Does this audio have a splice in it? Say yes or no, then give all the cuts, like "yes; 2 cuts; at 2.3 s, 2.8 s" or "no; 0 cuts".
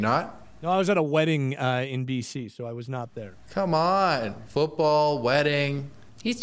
no; 0 cuts